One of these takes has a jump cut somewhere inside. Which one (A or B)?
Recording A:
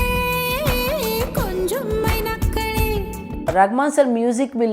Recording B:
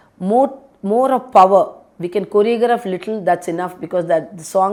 A